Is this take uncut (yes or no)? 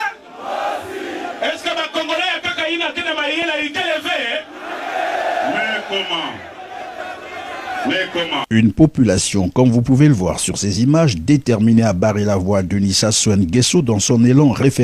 no